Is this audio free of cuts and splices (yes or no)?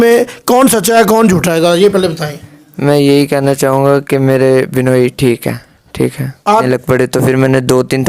no